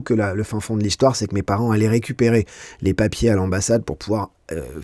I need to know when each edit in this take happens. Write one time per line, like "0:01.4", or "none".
none